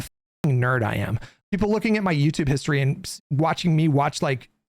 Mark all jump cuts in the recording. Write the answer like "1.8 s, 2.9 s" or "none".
1.4 s